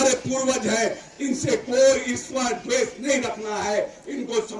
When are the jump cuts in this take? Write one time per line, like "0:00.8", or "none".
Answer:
none